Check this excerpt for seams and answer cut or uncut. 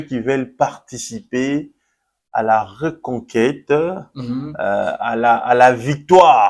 uncut